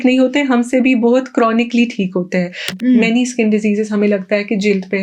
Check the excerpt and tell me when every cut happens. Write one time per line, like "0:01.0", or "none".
0:02.6